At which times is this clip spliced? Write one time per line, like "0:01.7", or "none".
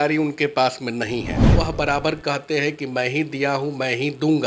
0:01.5